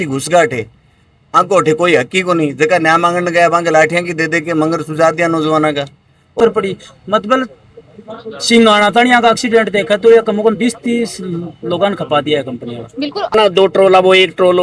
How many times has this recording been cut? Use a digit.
2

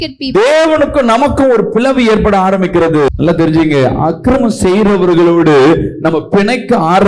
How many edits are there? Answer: 1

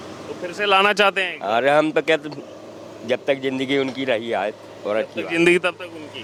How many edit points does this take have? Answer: 0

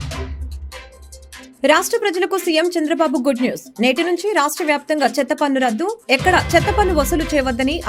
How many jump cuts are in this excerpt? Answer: 1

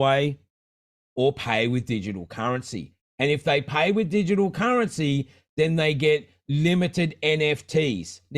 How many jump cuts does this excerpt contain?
0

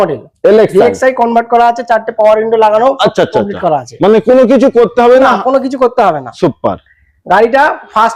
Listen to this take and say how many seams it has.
0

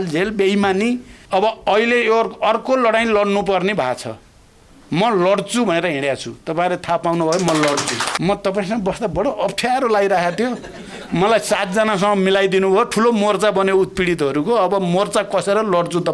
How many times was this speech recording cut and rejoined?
2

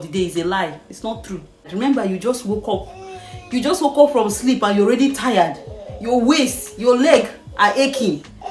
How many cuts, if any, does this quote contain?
1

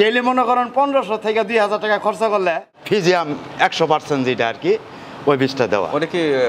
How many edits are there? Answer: 1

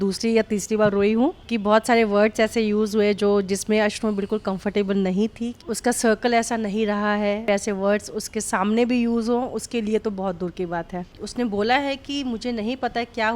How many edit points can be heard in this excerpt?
4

